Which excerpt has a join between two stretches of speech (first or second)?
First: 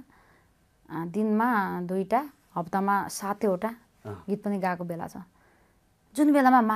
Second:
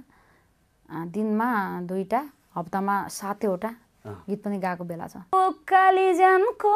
second